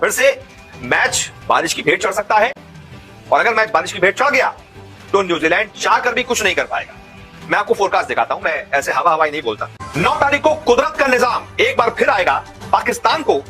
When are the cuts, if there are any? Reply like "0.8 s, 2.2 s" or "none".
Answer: none